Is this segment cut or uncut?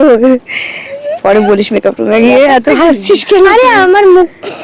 uncut